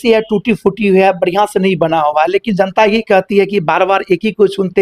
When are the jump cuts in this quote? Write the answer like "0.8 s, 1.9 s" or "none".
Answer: none